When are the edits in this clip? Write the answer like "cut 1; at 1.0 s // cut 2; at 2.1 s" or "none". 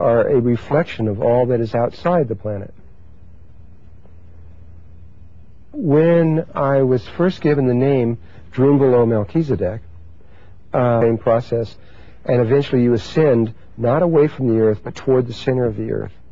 none